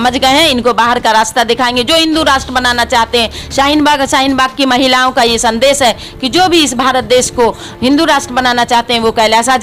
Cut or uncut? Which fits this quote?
uncut